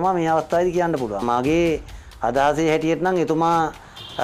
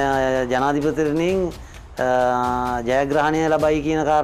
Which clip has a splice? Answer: first; 1 cut; at 1.2 s

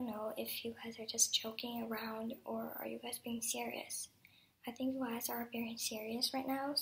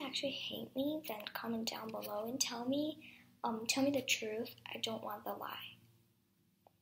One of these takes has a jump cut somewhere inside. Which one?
first; 1 cut; at 5.6 s

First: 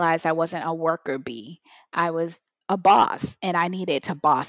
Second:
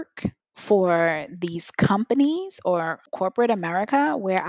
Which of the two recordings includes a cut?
second; 1 cut; at 3.0 s

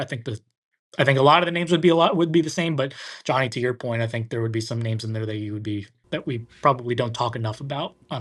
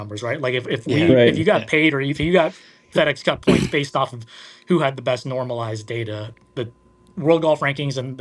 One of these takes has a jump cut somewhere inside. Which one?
second; 1 cut; at 6.3 s

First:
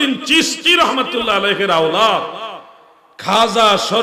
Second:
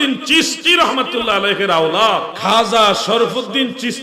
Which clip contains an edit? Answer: second; 1 cut; at 2.3 s

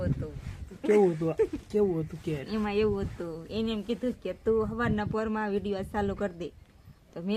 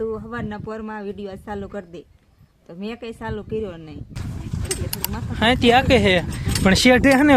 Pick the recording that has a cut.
second; 1 cut; at 4.2 s

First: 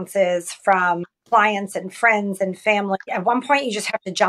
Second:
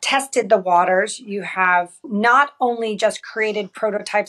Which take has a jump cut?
first; 2 cuts; at 1.1 s, 3.1 s

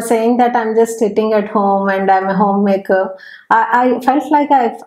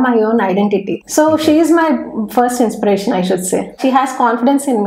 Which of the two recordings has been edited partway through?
second; 2 cuts; at 1.0 s, 3.8 s

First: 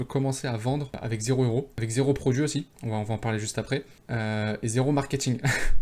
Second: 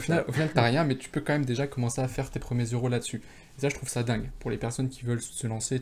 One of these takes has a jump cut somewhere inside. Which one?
first; 4 cuts; at 1.0 s, 1.7 s, 2.7 s, 4.0 s

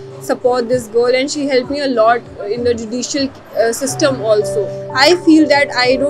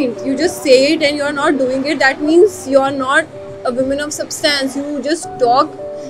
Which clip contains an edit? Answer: first; 1 cut; at 4.7 s

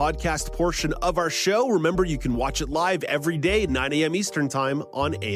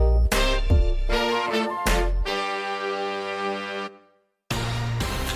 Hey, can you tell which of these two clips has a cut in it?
second; 1 cut; at 4.4 s

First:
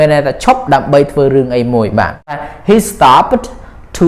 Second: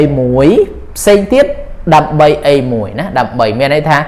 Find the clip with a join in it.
first; 1 cut; at 2.5 s

